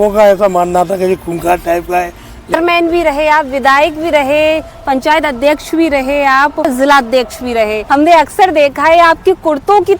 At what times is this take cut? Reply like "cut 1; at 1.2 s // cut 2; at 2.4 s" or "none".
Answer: cut 1; at 2.6 s // cut 2; at 6.7 s // cut 3; at 7.8 s